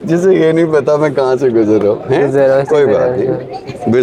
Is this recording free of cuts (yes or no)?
yes